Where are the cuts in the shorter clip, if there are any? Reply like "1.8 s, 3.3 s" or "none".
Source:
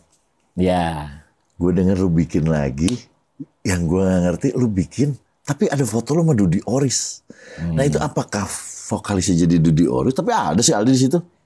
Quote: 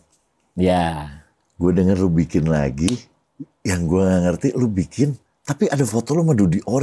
none

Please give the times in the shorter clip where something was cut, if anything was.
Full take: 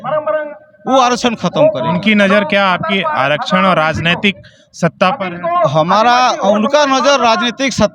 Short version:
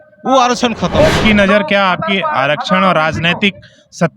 1.2 s

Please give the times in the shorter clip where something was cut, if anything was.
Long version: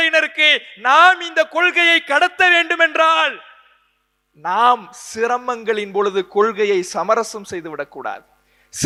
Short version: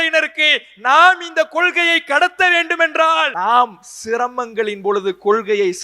3.3 s

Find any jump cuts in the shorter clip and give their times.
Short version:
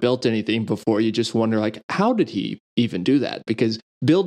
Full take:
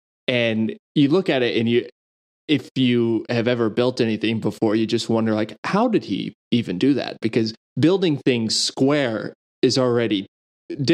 none

